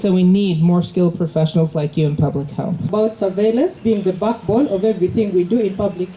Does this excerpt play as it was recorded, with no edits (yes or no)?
no